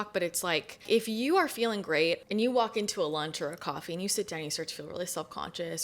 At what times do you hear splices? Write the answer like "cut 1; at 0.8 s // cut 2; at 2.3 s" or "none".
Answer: cut 1; at 0.8 s // cut 2; at 2.2 s